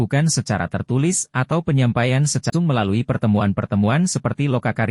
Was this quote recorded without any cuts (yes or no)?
no